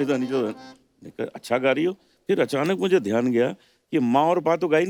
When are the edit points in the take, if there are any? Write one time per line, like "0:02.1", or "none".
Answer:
none